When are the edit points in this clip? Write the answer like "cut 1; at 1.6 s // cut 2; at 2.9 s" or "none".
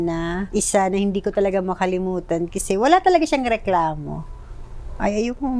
none